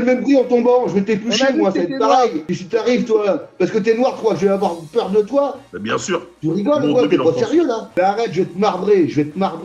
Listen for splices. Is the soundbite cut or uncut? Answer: uncut